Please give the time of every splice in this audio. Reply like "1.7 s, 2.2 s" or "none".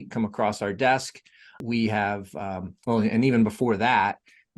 1.6 s

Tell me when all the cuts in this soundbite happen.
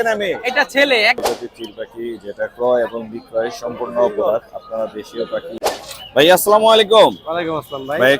1.2 s, 5.8 s

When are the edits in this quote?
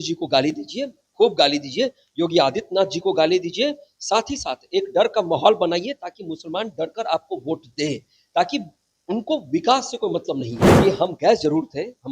10.6 s

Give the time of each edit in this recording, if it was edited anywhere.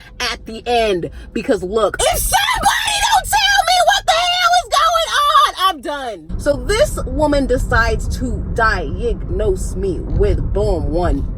2.0 s, 6.3 s

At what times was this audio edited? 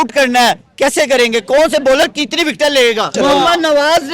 3.1 s

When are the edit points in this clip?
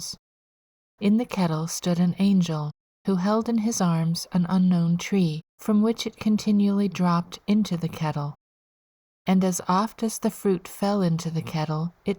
5.5 s

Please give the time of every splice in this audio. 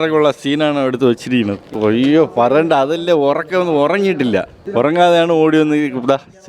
1.7 s, 4.6 s

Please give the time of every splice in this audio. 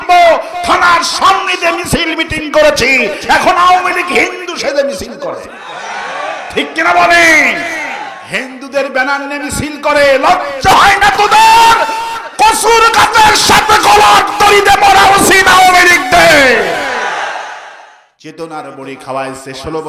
17.6 s

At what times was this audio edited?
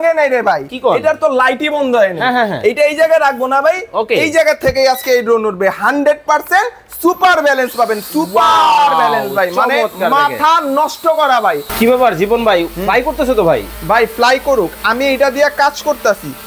11.7 s

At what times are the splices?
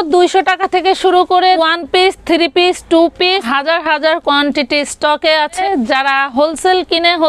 1.6 s, 3.5 s, 5.6 s

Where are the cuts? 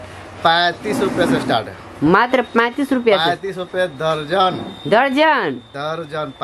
none

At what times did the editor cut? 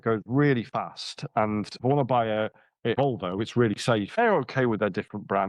1.7 s, 2.9 s, 4.2 s

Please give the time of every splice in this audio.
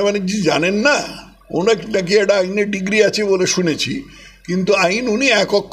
none

